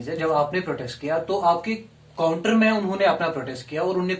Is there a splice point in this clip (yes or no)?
no